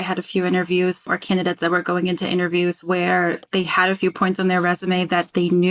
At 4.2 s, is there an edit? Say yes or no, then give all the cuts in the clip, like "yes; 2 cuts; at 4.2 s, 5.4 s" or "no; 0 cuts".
no; 1 cut; at 1.2 s